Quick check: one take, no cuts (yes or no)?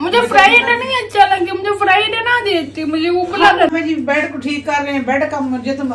no